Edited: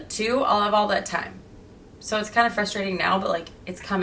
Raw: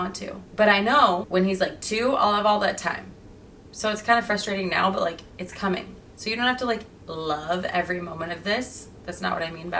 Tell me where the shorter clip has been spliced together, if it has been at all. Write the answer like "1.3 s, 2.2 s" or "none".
none

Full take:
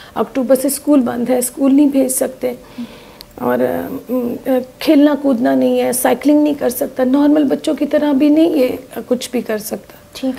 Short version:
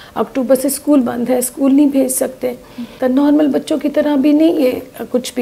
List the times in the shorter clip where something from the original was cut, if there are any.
2.9 s

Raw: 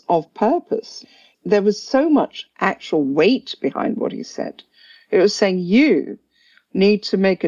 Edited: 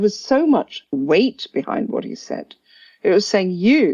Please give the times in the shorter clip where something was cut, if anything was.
0.9 s

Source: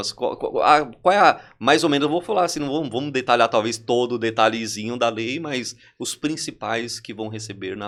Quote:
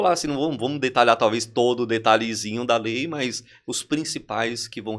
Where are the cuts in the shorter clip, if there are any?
none

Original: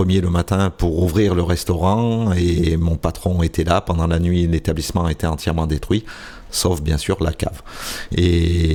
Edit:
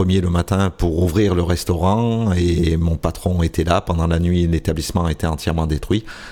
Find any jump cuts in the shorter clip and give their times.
none

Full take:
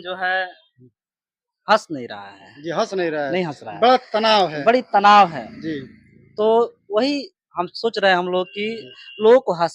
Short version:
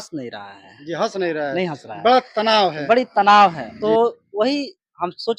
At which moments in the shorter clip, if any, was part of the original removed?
3.7 s

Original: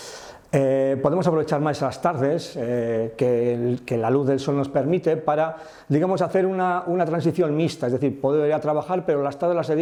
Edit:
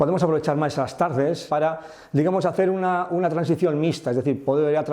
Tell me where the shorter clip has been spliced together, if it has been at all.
1.5 s

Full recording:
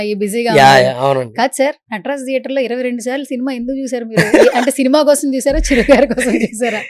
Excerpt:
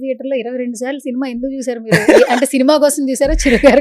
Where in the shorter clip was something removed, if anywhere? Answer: none

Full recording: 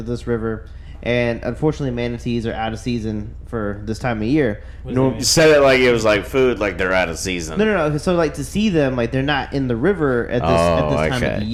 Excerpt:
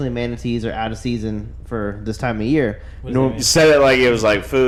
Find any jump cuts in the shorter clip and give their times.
none

